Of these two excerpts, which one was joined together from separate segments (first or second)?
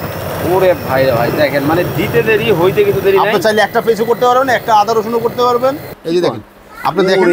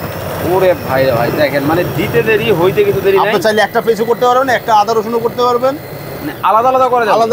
first